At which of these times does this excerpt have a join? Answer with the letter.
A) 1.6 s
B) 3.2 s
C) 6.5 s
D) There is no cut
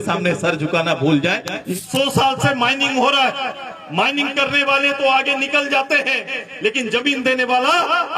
A